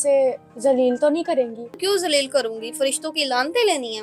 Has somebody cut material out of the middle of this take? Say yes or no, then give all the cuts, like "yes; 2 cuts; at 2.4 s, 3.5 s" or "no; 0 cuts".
yes; 1 cut; at 1.8 s